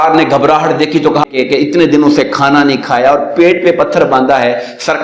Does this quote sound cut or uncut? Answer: cut